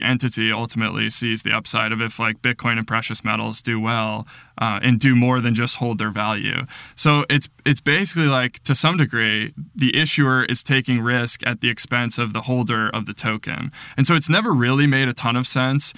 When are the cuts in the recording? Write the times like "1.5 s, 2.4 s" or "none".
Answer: none

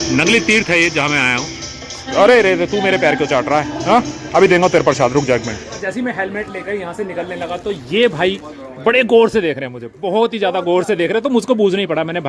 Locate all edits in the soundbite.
2.0 s, 5.7 s

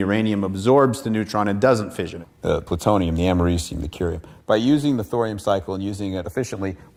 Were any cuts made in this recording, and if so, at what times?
none

